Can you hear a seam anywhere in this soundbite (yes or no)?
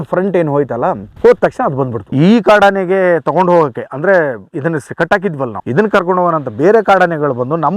yes